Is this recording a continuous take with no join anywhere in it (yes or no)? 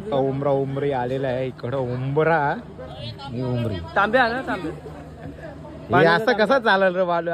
yes